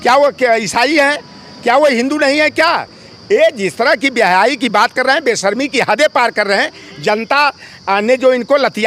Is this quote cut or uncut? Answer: uncut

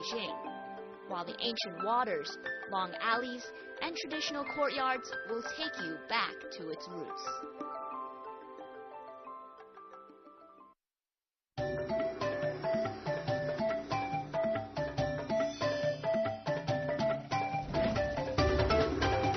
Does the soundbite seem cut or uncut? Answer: uncut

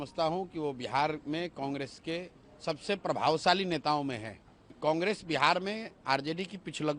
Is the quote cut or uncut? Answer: cut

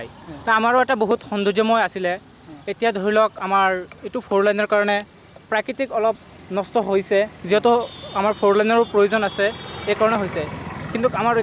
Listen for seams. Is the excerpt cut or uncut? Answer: uncut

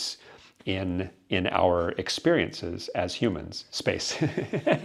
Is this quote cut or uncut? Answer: uncut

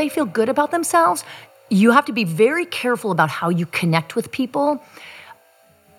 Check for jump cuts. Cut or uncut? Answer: cut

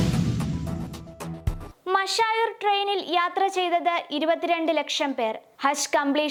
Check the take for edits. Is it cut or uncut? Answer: uncut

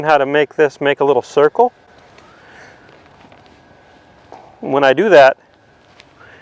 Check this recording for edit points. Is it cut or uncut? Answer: uncut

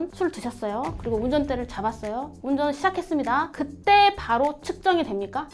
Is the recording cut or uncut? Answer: uncut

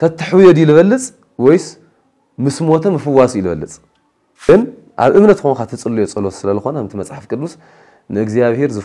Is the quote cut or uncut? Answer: cut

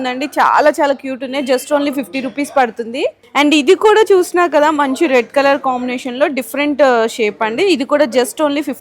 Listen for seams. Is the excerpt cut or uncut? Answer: uncut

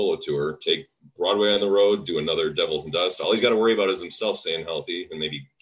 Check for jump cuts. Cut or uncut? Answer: uncut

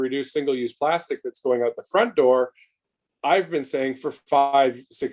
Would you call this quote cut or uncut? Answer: uncut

